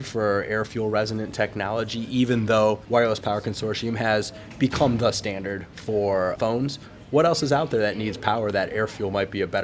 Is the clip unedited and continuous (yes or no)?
no